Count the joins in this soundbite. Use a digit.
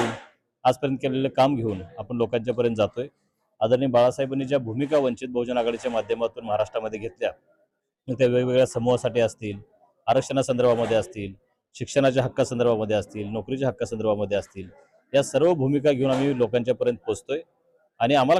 0